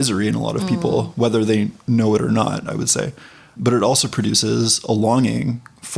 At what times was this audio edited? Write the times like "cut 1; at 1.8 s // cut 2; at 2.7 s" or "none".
none